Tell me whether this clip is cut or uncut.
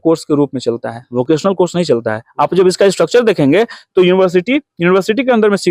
uncut